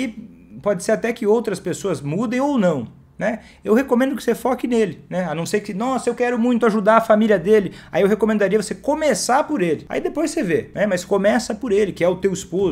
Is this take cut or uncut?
cut